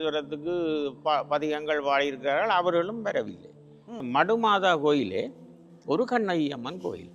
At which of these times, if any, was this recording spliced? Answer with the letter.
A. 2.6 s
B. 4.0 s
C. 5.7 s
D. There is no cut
B